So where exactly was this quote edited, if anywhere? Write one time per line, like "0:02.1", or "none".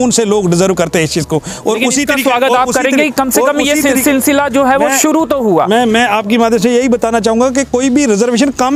none